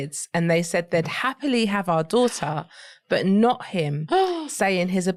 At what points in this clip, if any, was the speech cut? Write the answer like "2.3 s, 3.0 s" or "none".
none